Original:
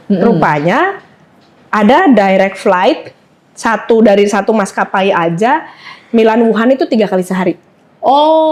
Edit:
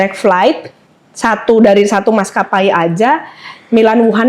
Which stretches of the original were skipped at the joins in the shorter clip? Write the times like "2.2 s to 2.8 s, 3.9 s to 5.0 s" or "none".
none